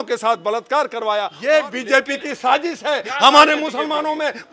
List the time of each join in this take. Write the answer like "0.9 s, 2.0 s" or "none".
1.3 s